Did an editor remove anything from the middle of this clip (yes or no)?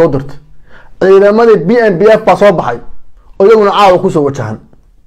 no